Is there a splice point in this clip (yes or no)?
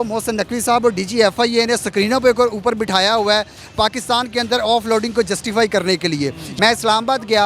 yes